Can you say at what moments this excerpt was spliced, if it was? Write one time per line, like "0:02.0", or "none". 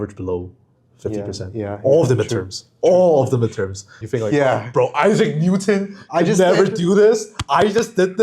0:04.0